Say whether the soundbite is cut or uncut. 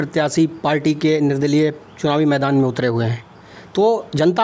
uncut